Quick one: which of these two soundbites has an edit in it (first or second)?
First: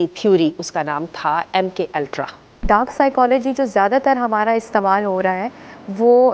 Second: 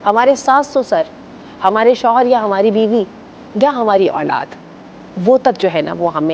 first